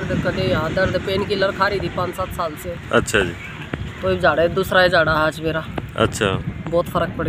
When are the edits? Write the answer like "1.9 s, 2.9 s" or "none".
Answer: none